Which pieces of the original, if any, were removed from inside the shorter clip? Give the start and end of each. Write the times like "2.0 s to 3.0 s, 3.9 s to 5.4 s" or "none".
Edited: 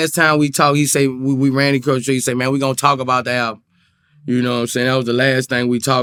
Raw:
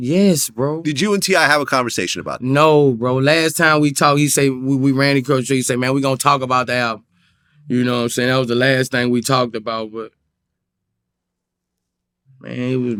none